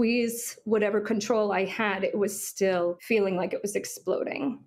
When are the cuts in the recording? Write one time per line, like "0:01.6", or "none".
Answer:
0:03.0

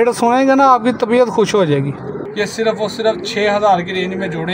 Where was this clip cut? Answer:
0:02.2

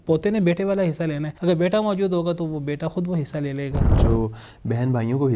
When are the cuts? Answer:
0:01.3
0:03.9

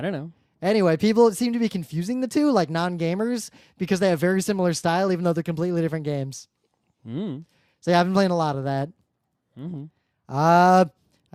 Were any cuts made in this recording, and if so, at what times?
0:04.4

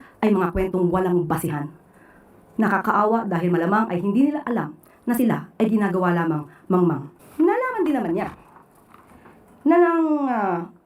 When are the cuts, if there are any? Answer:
0:07.1

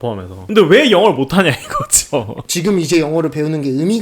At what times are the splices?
0:02.3

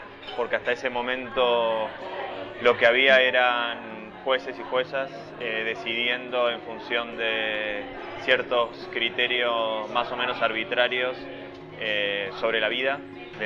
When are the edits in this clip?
0:03.8

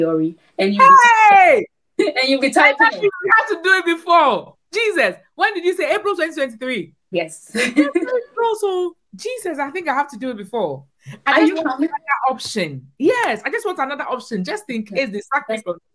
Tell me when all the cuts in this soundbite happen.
none

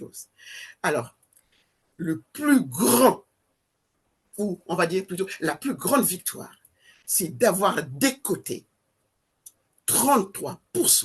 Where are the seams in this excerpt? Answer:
none

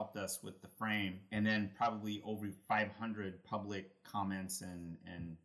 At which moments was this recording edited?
0:01.2

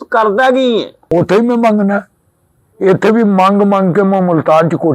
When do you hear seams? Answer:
0:01.0

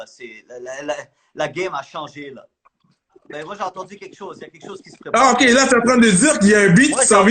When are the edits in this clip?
0:03.2

